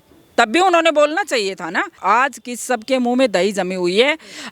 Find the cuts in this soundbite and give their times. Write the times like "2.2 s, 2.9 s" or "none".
2.0 s